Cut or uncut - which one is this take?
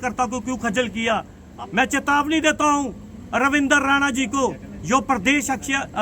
cut